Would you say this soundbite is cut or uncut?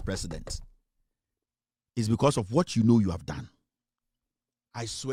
uncut